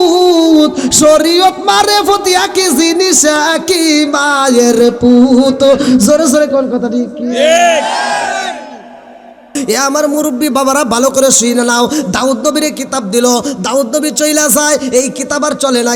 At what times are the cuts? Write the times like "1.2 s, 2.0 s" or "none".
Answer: 9.5 s